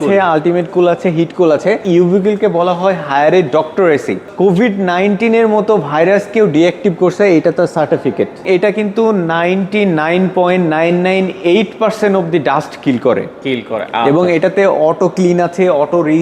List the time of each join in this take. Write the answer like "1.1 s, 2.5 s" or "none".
1.8 s, 4.3 s, 8.4 s